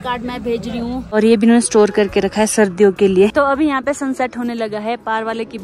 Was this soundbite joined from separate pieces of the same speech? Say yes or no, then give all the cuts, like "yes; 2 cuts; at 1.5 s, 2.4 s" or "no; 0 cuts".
yes; 2 cuts; at 1.2 s, 3.3 s